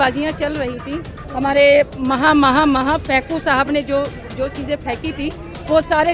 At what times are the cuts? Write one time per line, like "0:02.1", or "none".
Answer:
none